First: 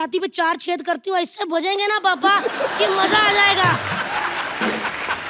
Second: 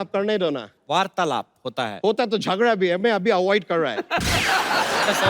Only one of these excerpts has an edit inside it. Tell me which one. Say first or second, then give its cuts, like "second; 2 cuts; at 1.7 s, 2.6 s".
second; 1 cut; at 1.9 s